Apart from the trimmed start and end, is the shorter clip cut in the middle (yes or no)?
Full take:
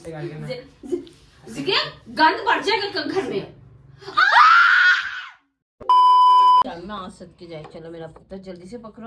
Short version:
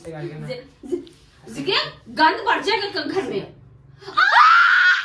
no